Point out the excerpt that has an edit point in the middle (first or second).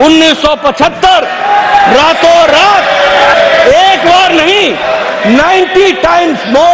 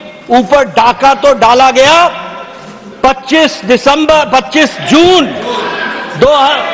first